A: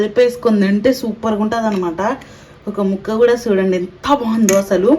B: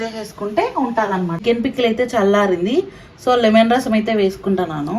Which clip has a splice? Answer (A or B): B